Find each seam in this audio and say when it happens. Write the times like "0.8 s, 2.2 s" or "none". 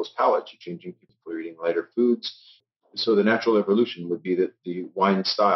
1.1 s, 2.6 s